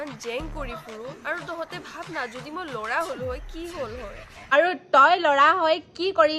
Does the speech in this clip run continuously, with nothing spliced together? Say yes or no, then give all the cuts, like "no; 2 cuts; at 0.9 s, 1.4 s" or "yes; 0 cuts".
no; 1 cut; at 4.5 s